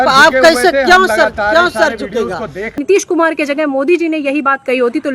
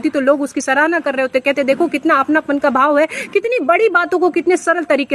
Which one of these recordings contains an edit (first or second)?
first